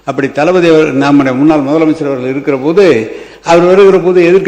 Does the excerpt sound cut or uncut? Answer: uncut